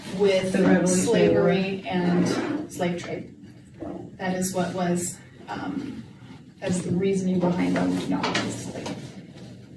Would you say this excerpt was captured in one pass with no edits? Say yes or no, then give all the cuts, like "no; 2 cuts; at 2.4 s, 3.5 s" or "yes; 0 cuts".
yes; 0 cuts